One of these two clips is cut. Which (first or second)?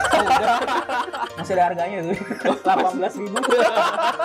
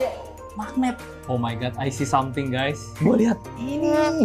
second